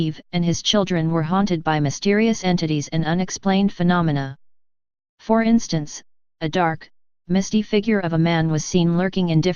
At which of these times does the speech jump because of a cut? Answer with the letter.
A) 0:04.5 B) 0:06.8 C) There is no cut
C